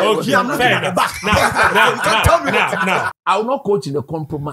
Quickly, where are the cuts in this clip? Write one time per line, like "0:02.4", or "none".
0:03.1